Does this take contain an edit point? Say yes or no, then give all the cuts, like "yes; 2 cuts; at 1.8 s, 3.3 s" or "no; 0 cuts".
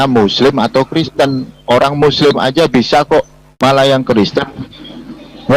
no; 0 cuts